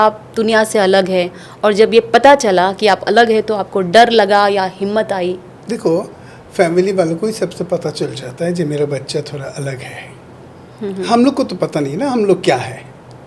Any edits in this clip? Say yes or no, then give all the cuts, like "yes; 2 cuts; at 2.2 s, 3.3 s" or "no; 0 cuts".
no; 0 cuts